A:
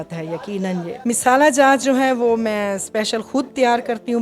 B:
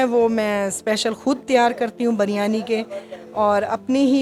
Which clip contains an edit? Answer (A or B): A